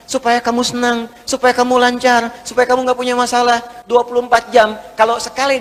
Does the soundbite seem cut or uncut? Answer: uncut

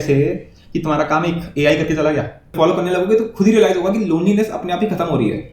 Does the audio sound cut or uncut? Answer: cut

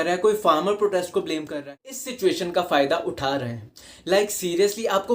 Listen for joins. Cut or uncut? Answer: cut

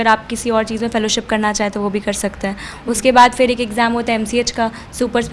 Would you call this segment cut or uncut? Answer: uncut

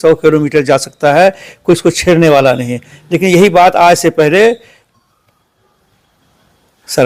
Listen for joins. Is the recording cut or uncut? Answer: uncut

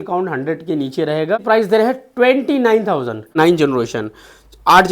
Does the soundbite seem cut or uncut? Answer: cut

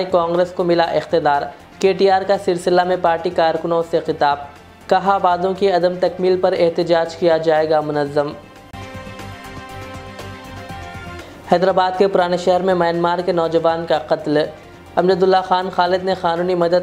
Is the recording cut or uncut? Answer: uncut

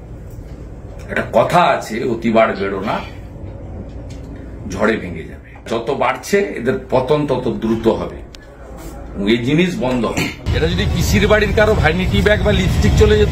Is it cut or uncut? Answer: cut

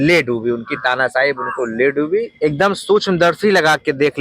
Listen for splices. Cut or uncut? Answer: cut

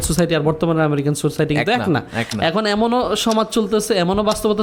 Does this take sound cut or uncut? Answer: uncut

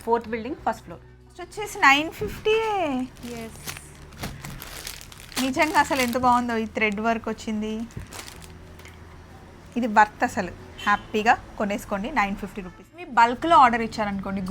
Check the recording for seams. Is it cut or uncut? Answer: cut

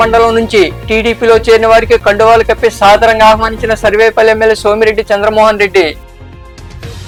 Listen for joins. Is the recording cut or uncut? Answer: uncut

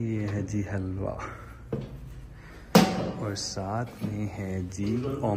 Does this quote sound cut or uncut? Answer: uncut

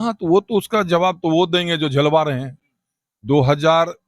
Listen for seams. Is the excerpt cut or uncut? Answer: uncut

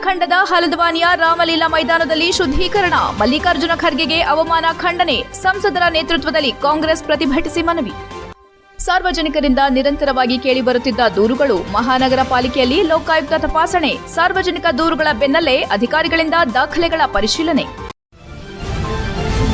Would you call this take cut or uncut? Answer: cut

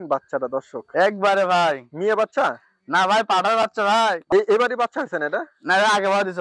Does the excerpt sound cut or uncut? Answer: cut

